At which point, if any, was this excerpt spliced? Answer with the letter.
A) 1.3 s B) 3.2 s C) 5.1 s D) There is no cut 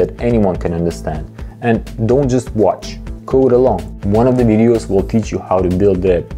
D